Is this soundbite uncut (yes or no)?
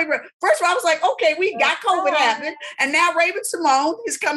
yes